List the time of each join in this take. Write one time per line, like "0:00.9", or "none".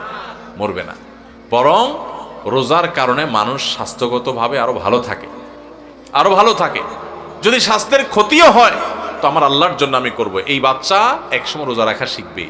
none